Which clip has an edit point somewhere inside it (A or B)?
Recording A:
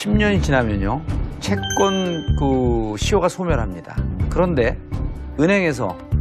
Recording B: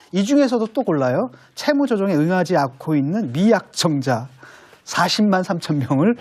A